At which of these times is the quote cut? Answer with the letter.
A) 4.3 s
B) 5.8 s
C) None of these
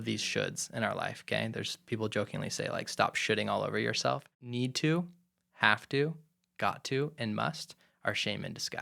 A